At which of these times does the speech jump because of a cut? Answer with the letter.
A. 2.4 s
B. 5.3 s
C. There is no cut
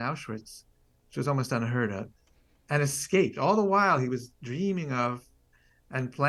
C